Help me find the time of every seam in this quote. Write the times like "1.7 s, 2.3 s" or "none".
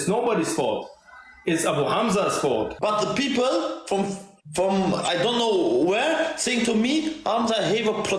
2.7 s